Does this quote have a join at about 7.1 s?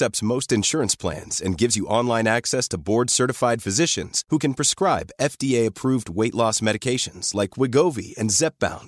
no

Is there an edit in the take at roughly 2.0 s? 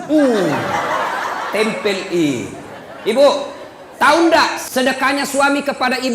no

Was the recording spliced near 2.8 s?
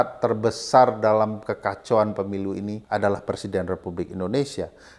yes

